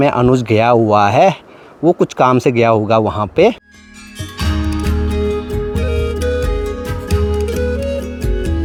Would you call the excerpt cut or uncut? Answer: uncut